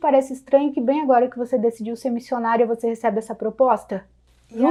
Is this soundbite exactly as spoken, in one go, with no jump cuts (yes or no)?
yes